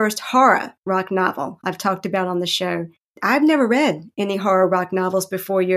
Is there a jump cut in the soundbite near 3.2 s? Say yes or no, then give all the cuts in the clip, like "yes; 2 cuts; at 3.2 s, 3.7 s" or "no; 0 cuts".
yes; 1 cut; at 3.2 s